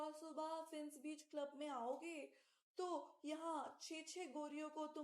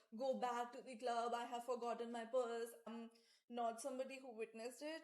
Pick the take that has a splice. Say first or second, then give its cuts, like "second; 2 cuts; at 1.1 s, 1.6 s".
second; 1 cut; at 2.8 s